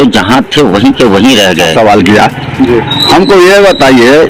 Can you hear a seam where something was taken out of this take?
yes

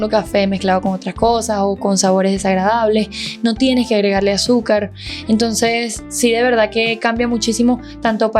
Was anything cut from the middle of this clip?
no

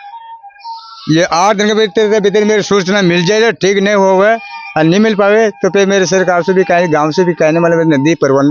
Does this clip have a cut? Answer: no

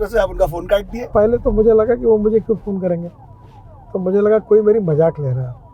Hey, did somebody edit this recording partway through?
yes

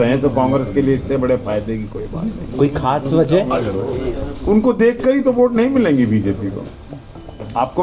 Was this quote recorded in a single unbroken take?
yes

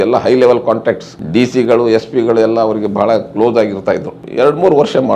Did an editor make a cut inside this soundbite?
yes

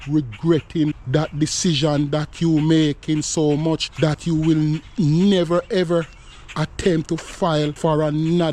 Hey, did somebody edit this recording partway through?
yes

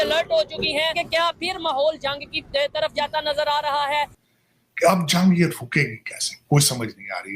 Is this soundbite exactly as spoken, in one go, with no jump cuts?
no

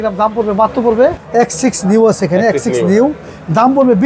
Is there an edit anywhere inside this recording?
yes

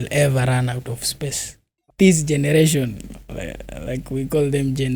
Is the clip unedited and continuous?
no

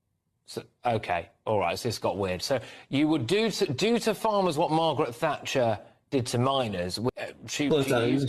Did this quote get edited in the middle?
yes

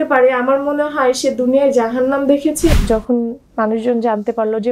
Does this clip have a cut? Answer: yes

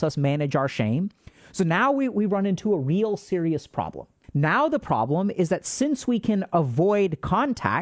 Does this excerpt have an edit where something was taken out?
yes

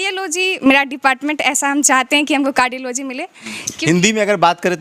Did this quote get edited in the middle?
no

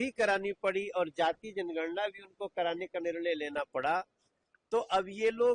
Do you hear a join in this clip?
no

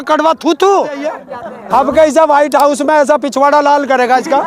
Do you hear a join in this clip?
yes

